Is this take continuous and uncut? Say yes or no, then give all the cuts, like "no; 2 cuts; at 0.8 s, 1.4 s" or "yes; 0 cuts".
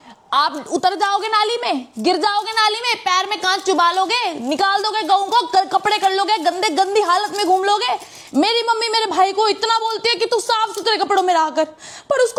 yes; 0 cuts